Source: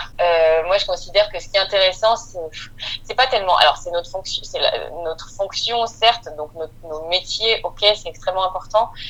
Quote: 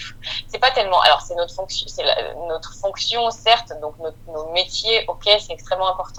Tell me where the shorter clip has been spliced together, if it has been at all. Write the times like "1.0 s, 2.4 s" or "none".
none